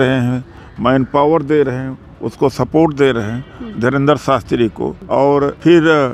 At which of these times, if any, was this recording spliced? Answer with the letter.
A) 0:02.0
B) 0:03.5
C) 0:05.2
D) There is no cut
C